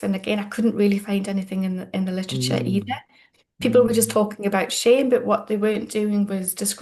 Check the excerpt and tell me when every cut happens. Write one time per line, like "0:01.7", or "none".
none